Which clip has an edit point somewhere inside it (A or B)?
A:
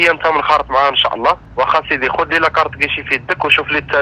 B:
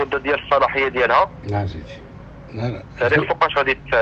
A